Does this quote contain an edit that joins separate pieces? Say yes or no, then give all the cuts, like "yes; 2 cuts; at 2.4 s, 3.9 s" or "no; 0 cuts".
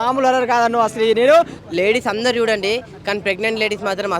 yes; 1 cut; at 1.6 s